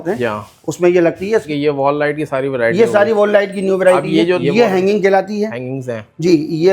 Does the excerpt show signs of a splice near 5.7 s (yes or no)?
no